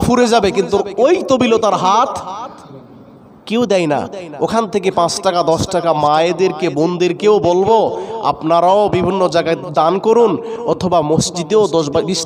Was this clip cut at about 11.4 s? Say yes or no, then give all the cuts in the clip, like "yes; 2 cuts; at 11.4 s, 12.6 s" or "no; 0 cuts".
no; 1 cut; at 9.6 s